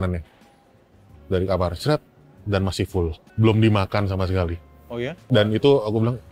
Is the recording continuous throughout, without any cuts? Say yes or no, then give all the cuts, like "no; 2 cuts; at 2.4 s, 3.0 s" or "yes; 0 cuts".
no; 2 cuts; at 3.2 s, 5.2 s